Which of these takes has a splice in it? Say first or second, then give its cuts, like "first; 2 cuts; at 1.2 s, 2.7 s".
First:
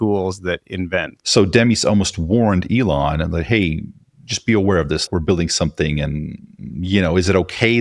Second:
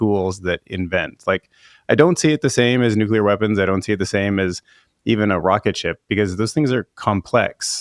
first; 2 cuts; at 1.1 s, 5.0 s